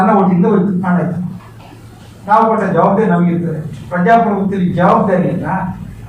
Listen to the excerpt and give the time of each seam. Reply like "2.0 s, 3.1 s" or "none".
none